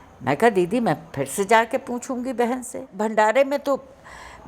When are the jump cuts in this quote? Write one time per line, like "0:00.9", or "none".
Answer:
0:02.9